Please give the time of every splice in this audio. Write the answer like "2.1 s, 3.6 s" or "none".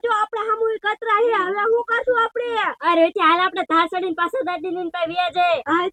none